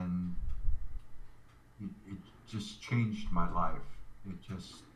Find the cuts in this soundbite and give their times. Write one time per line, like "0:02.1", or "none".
none